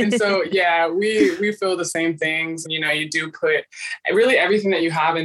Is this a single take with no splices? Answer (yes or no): no